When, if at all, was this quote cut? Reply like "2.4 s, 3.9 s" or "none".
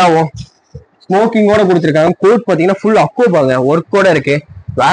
none